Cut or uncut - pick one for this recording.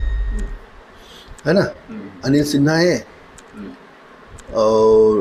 uncut